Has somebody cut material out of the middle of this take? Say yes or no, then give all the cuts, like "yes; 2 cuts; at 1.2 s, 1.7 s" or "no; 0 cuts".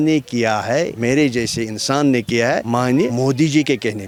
no; 0 cuts